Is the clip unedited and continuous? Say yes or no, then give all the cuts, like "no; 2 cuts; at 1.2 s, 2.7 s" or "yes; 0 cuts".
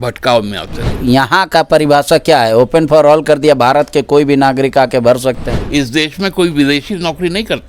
no; 2 cuts; at 0.9 s, 5.5 s